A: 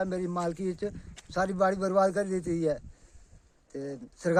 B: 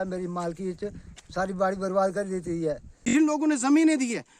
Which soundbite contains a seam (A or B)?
B